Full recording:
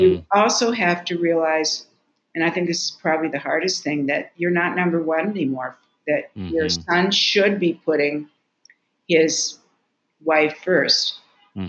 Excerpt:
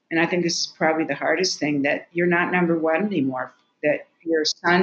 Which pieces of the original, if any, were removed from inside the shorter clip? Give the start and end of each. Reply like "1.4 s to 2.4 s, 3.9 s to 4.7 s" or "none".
none